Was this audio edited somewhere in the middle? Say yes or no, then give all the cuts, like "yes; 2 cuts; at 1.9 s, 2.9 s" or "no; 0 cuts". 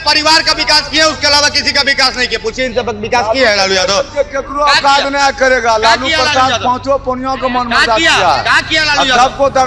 no; 0 cuts